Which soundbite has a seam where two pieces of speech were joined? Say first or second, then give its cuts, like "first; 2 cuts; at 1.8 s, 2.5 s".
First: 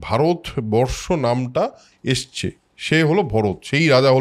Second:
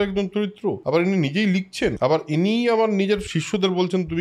second; 3 cuts; at 0.8 s, 2.0 s, 3.3 s